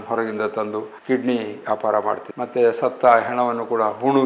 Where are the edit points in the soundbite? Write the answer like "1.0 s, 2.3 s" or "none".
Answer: 0.9 s